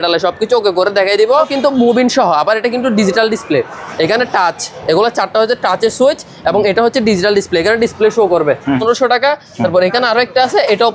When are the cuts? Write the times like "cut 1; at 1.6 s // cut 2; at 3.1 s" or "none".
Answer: cut 1; at 1.5 s // cut 2; at 8.8 s